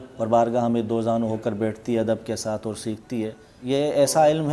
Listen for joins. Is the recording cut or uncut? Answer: cut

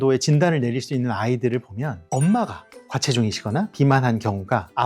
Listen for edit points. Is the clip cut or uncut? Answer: cut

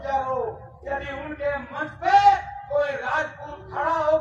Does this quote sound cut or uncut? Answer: uncut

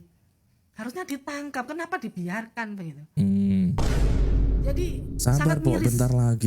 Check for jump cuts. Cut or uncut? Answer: uncut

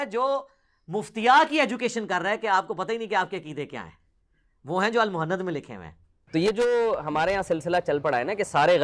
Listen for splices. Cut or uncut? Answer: cut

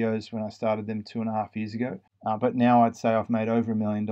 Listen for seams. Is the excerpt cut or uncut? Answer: cut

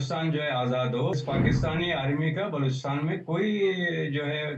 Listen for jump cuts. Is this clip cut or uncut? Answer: cut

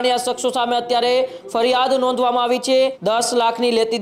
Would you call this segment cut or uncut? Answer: cut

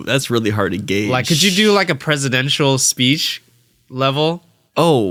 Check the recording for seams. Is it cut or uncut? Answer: uncut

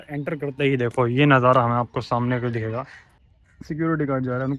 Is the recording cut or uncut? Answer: cut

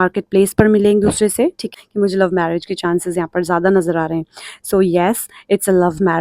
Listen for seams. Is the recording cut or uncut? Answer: cut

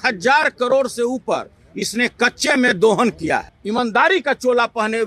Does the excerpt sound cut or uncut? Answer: cut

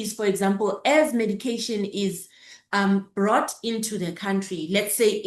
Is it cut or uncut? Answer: uncut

